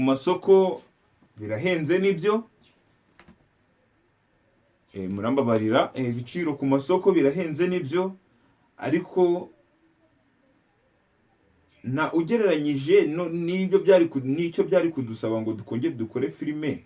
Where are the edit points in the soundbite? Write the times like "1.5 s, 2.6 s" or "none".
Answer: none